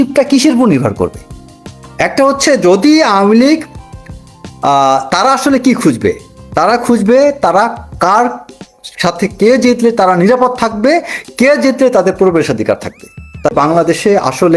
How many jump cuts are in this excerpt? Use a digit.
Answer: 1